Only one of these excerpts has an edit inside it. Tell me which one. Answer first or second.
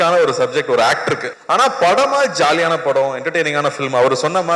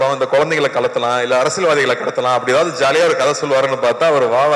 first